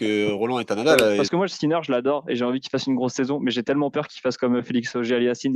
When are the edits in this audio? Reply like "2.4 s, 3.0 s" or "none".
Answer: 1.3 s